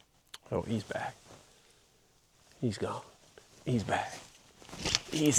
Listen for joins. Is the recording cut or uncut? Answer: uncut